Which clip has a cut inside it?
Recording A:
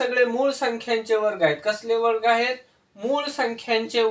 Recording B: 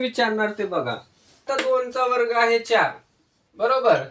B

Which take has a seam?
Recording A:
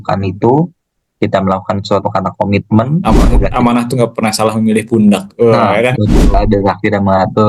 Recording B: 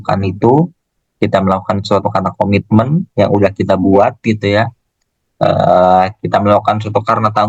A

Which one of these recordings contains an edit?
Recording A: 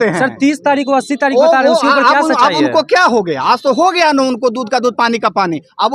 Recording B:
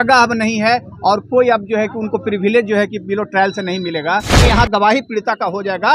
B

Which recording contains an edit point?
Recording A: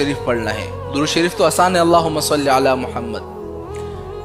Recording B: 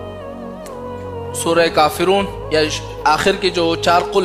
A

